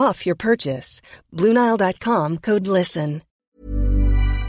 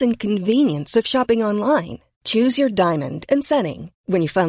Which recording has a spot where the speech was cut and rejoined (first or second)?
first